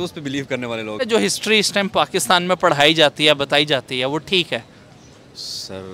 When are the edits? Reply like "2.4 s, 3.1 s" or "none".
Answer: 1.0 s